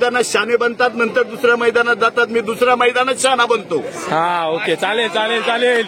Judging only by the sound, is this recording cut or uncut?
uncut